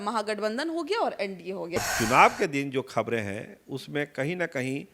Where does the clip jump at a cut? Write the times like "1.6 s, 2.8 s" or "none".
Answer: 1.8 s